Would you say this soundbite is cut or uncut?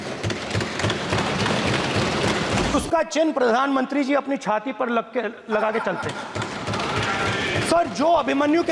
cut